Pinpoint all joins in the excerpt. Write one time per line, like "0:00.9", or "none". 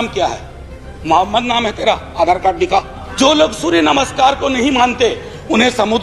0:03.0